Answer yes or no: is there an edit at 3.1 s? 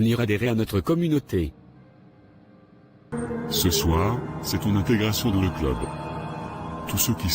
yes